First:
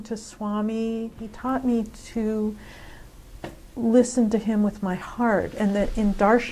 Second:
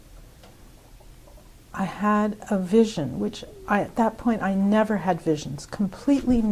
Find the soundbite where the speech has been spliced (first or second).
first